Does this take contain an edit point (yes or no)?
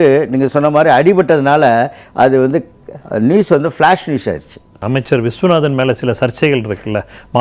yes